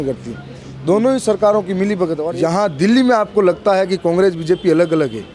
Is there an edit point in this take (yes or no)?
yes